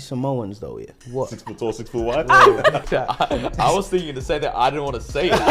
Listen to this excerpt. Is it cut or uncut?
cut